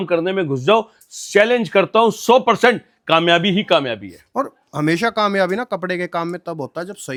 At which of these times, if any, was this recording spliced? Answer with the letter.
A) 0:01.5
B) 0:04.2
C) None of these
C